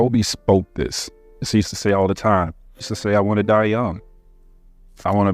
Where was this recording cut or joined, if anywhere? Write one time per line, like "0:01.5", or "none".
0:01.4
0:02.9

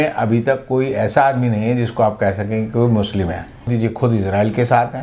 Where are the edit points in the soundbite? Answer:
0:03.7

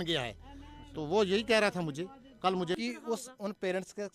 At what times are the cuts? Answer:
0:02.8

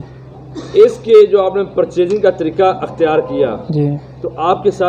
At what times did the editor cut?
none

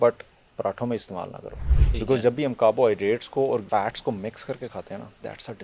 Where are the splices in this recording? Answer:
0:03.6

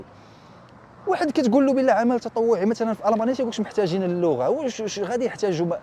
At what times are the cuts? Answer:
none

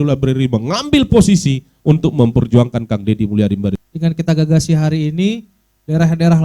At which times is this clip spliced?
0:03.8

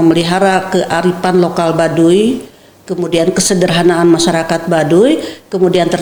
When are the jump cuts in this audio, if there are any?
none

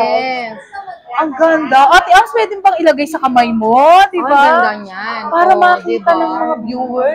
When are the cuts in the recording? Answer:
none

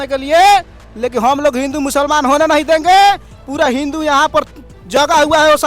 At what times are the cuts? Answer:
none

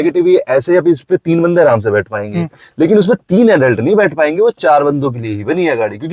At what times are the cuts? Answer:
none

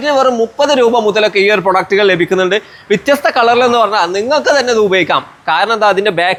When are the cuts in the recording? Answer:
none

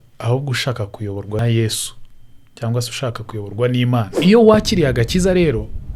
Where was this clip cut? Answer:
0:01.4
0:04.1

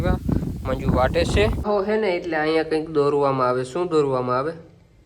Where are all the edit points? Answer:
0:01.6

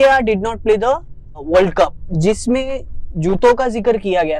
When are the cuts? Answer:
0:01.4
0:02.0

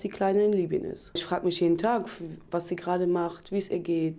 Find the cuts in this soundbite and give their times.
0:01.2

